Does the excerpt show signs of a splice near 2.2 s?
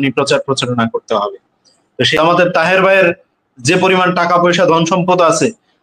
yes; 1 cut; at 2.2 s

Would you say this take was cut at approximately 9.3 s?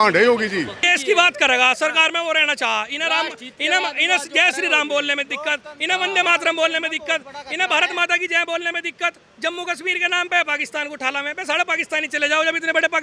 no; 1 cut; at 0.9 s

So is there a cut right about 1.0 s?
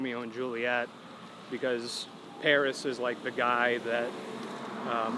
no; 0 cuts

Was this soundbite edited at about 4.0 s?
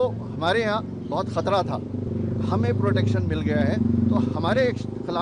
no; 1 cut; at 2.1 s

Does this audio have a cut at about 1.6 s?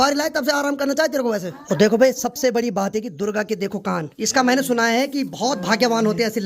yes; 2 cuts; at 1.6 s, 4.2 s

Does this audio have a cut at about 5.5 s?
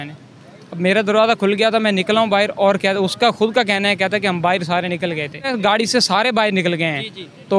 yes; 1 cut; at 5.5 s

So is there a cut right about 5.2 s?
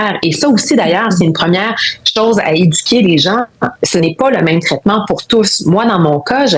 no; 0 cuts

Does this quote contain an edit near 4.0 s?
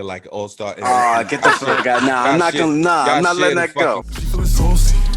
yes; 1 cut; at 4.0 s

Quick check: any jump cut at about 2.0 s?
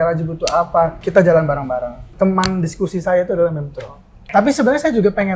yes; 3 cuts; at 1.0 s, 2.0 s, 4.2 s

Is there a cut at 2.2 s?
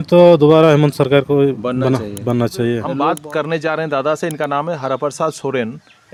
no; 0 cuts

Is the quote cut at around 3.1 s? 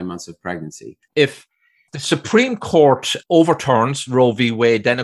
yes; 2 cuts; at 1.1 s, 3.1 s

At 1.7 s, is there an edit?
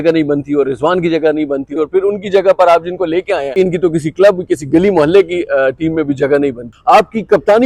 yes; 3 cuts; at 1.7 s, 3.5 s, 6.7 s

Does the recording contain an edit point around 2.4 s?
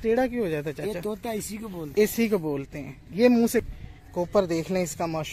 no; 1 cut; at 3.6 s

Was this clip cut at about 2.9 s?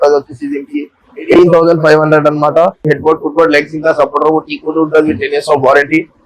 yes; 1 cut; at 2.9 s

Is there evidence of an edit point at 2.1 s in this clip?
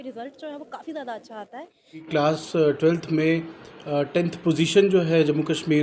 yes; 1 cut; at 2.1 s

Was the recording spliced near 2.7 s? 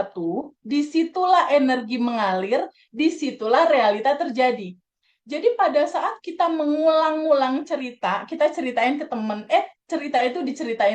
no; 0 cuts

